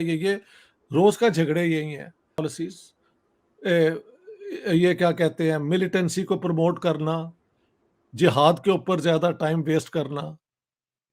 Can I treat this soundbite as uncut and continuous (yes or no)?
no